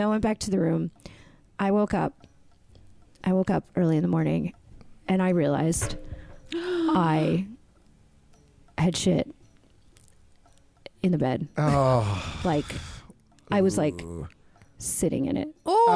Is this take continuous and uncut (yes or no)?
yes